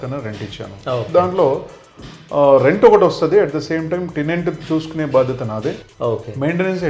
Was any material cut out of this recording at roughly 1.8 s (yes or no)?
no